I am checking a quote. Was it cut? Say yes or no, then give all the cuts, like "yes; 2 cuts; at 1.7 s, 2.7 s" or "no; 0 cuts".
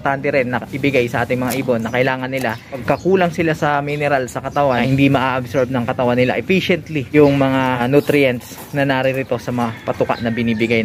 yes; 4 cuts; at 2.8 s, 4.8 s, 7.1 s, 7.8 s